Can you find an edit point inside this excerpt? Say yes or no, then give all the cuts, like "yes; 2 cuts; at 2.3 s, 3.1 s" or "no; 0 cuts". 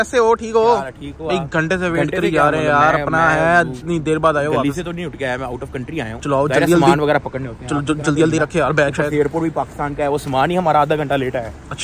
no; 0 cuts